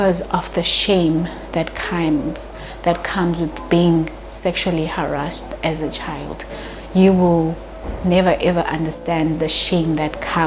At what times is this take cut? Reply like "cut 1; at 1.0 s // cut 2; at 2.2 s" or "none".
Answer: none